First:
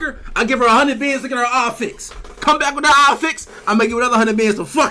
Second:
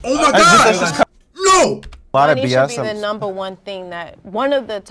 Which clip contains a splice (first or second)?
second